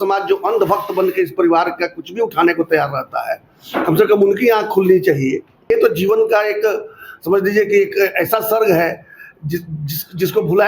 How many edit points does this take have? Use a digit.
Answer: 1